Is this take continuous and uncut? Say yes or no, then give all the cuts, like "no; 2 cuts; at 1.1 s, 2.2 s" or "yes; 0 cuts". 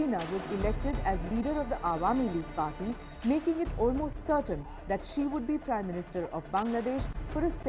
yes; 0 cuts